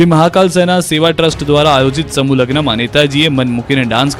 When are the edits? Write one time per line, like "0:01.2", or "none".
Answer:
none